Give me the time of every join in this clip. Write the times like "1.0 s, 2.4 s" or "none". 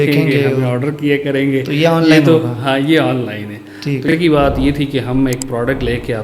4.1 s